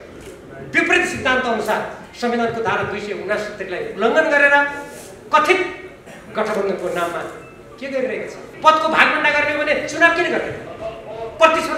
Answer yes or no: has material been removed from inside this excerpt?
yes